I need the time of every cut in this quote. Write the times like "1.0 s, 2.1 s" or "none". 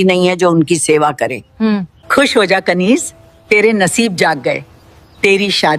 1.6 s